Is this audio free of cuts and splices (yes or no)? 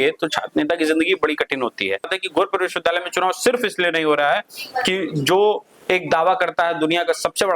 no